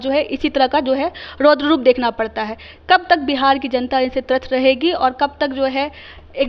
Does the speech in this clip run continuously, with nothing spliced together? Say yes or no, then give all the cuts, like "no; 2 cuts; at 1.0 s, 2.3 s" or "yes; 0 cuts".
yes; 0 cuts